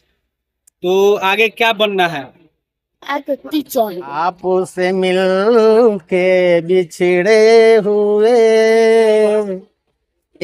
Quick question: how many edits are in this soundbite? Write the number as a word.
one